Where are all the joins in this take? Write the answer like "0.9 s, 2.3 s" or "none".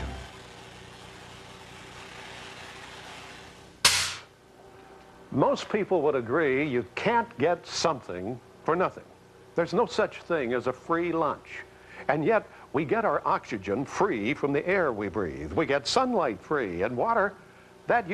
2.5 s